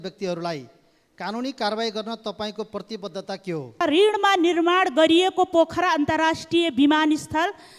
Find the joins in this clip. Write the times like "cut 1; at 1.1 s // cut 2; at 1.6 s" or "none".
cut 1; at 3.8 s

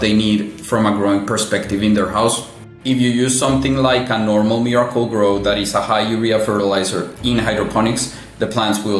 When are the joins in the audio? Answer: cut 1; at 2.6 s

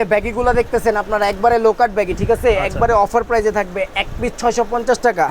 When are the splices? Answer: none

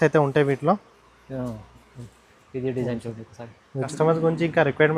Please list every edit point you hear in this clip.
cut 1; at 3.9 s

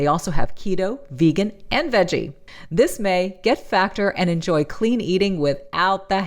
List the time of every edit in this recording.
cut 1; at 2.4 s

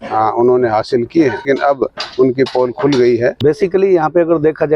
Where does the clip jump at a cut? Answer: cut 1; at 1.4 s // cut 2; at 3.4 s

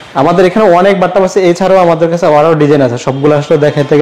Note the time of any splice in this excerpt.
none

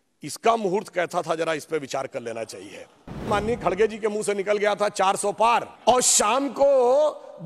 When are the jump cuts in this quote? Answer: cut 1; at 3.3 s // cut 2; at 5.7 s

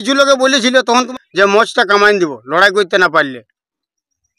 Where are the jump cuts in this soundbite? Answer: cut 1; at 1.1 s

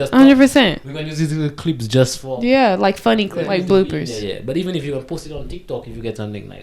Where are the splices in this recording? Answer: cut 1; at 3.4 s

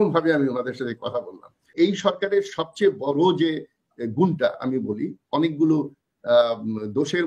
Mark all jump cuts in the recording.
cut 1; at 1.7 s

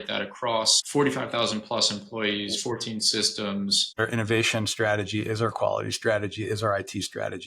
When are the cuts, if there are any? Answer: cut 1; at 4.0 s

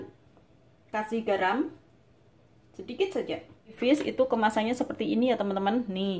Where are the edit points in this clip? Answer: cut 1; at 3.7 s

